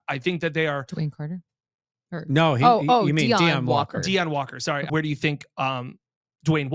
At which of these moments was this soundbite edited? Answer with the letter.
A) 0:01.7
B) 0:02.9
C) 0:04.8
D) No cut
C